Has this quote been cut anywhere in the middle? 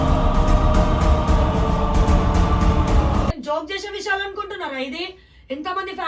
yes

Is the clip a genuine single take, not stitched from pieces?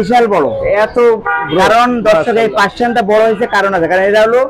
yes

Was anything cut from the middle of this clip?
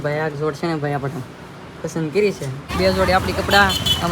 yes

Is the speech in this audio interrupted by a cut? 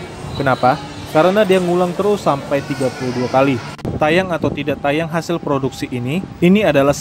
yes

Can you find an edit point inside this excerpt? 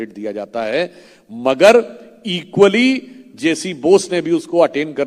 no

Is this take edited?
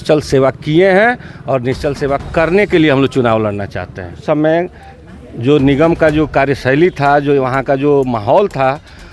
yes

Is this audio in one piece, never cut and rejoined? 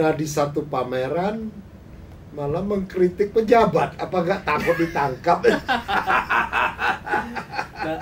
yes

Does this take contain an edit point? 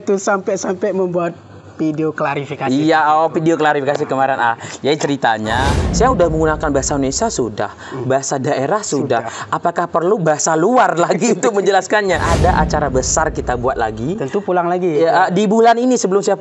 yes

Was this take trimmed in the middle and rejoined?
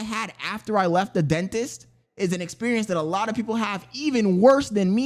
no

